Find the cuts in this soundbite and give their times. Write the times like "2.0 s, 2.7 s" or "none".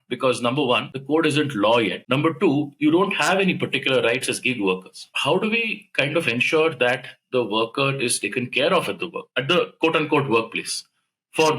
0.9 s, 2.0 s, 5.1 s